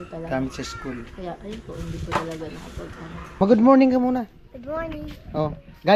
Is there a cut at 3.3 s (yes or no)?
yes